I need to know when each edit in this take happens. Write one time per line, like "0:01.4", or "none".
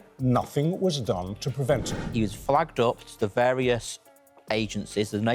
0:01.9